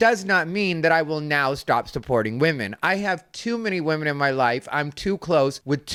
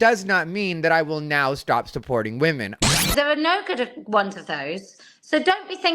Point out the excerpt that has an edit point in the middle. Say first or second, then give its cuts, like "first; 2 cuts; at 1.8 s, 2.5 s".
second; 1 cut; at 3.1 s